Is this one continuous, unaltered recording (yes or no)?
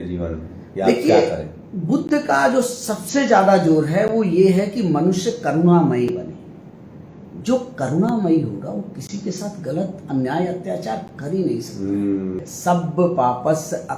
no